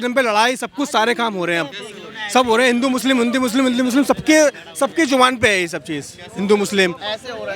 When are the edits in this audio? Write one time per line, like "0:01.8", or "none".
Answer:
none